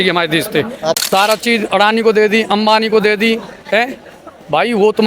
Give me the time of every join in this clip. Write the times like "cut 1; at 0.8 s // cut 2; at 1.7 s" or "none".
cut 1; at 1.0 s